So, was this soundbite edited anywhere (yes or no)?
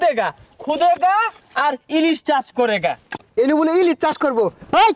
yes